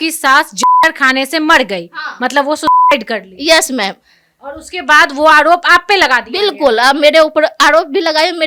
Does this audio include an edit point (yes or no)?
no